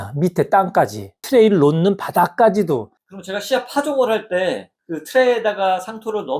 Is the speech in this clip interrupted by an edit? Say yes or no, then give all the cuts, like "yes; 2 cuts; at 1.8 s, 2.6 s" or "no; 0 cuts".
yes; 2 cuts; at 1.2 s, 2.9 s